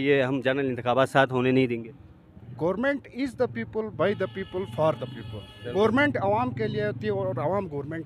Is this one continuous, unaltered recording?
yes; 0 cuts

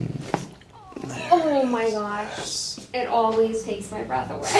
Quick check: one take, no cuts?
yes; 0 cuts

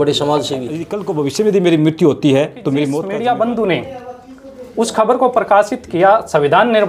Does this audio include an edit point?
yes; 2 cuts; at 1.0 s, 3.0 s

